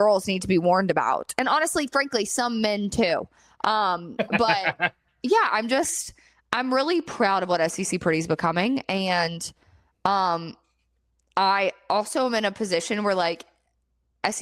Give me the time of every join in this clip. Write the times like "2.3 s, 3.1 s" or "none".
none